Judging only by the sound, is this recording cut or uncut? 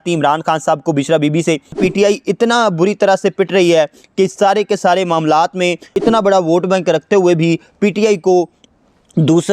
cut